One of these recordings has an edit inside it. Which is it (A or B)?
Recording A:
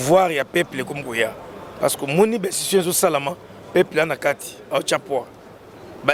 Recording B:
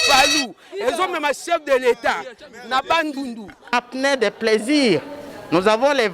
B